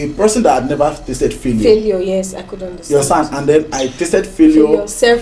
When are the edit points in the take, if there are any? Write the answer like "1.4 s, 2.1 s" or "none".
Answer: none